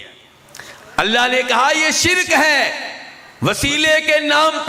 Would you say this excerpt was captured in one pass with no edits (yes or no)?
yes